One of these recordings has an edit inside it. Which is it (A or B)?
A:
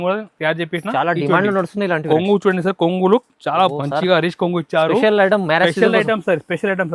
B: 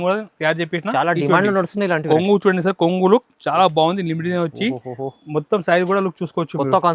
A